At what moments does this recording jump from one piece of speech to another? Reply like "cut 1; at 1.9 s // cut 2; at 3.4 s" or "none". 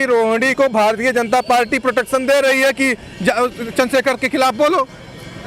none